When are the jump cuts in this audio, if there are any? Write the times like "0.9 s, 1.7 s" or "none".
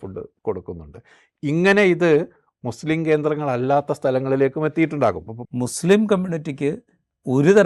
5.3 s